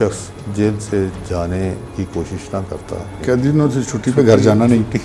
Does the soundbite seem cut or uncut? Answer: cut